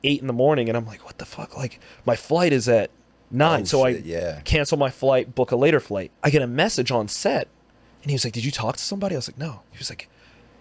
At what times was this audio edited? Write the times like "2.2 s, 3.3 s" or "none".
6.0 s